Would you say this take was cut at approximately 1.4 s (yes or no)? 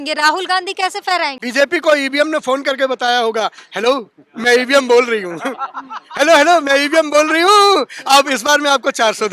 yes